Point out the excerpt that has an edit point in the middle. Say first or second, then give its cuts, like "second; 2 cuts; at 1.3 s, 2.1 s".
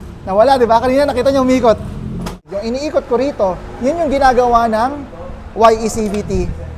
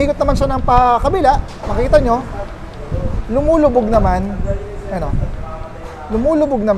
first; 1 cut; at 2.4 s